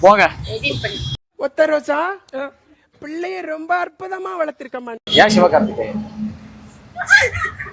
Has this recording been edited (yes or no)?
yes